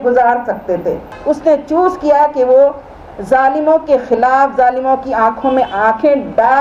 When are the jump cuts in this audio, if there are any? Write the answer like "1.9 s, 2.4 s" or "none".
1.1 s